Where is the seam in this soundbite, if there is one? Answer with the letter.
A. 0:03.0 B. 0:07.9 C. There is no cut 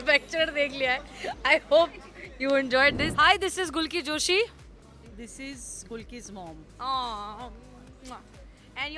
A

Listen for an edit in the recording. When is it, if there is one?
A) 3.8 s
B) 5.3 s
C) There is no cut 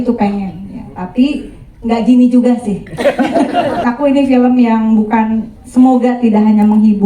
A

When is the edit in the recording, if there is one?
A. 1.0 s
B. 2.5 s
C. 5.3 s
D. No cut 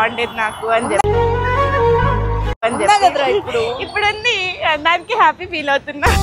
A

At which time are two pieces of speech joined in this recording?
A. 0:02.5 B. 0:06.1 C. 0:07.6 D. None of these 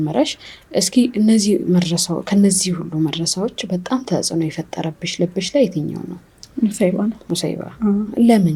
D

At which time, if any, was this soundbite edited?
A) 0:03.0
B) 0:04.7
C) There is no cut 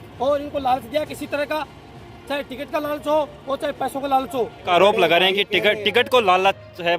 B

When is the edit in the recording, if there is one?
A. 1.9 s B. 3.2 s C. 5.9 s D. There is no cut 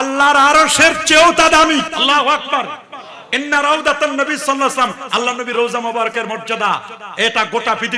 A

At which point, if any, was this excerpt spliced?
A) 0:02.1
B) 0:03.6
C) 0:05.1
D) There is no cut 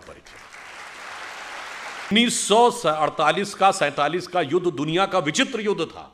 A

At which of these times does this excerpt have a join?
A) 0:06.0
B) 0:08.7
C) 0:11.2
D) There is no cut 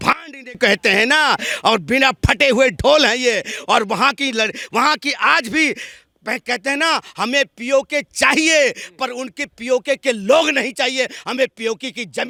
D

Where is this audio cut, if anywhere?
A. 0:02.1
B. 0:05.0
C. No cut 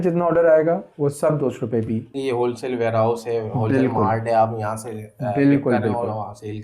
A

